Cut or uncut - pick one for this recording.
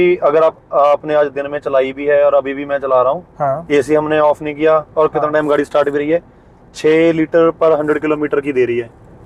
uncut